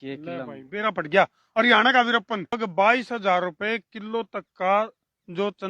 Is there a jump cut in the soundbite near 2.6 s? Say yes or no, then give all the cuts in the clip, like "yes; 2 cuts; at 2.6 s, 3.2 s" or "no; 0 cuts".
yes; 1 cut; at 2.6 s